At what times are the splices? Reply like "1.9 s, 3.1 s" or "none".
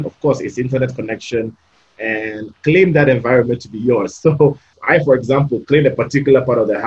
2.4 s, 4.7 s